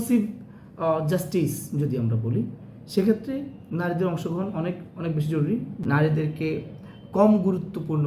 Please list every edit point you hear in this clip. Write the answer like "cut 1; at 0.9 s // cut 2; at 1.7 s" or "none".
cut 1; at 5.7 s

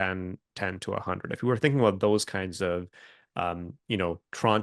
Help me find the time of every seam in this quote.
none

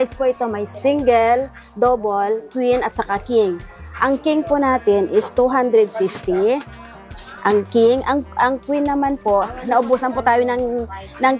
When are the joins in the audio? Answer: none

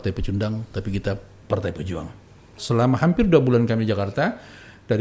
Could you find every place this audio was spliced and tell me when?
cut 1; at 2.6 s

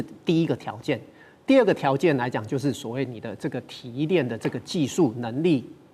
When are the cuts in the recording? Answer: none

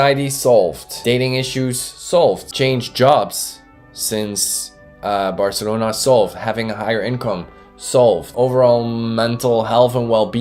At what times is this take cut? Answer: cut 1; at 0.9 s // cut 2; at 2.5 s // cut 3; at 8.3 s

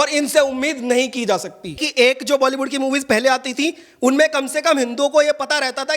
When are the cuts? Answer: cut 1; at 1.8 s

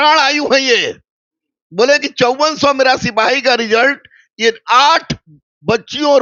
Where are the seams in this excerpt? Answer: none

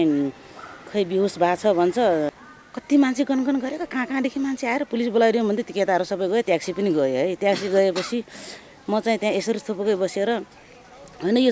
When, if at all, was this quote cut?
cut 1; at 2.3 s

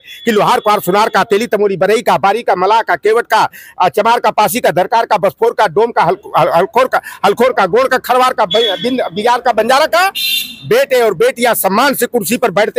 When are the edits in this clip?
none

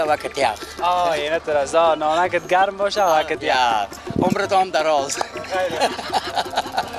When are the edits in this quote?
none

